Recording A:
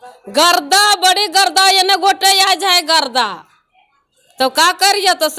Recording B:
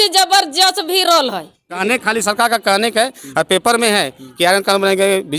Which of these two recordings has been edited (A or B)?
B